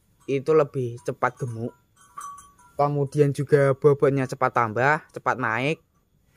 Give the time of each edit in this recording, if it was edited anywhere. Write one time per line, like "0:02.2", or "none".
none